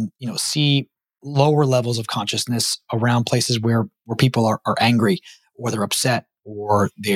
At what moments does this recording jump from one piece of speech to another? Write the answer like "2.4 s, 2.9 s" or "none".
none